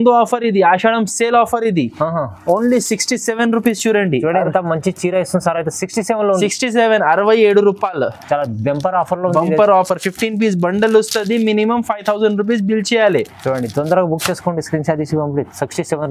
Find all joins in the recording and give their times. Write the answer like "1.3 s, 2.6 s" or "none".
none